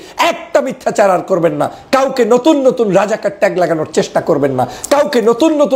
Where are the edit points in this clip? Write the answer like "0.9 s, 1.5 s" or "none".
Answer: none